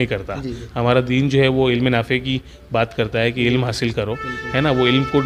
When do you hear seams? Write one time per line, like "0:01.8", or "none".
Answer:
none